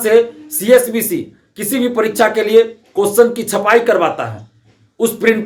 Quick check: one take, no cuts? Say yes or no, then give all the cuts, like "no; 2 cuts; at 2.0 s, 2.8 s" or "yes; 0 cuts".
yes; 0 cuts